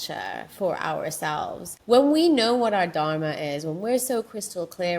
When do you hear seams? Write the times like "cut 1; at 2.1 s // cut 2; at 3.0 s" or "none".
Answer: cut 1; at 1.7 s